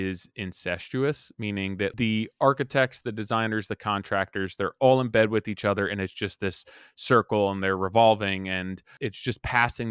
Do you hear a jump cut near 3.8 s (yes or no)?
no